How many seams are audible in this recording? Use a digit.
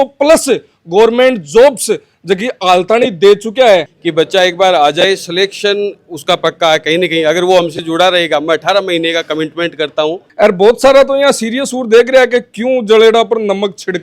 2